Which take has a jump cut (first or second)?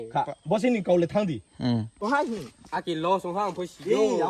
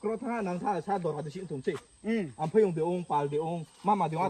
first